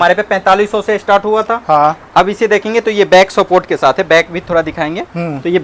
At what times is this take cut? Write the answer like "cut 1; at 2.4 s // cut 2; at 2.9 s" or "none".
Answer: none